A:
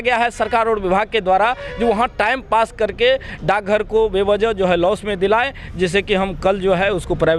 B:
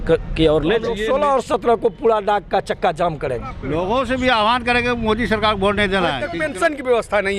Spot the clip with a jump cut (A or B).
B